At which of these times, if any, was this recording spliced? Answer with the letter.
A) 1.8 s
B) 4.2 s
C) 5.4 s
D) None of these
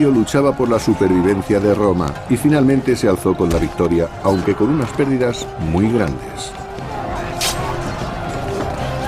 C